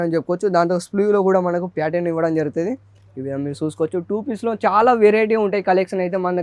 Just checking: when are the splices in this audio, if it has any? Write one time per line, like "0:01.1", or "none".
none